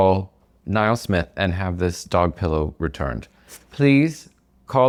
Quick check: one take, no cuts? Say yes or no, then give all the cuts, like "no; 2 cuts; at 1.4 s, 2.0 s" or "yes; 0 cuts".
yes; 0 cuts